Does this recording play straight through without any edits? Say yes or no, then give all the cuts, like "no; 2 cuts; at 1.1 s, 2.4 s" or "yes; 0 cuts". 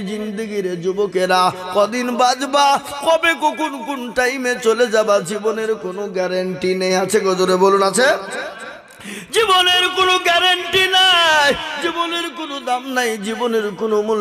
yes; 0 cuts